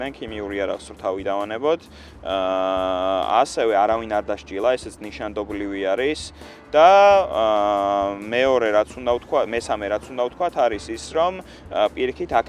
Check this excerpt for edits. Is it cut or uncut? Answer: uncut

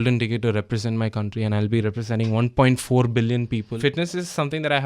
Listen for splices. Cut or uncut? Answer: cut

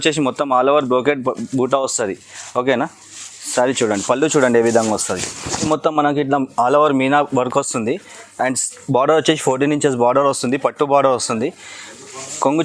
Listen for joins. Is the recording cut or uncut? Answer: cut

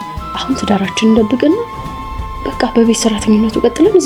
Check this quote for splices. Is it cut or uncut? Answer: uncut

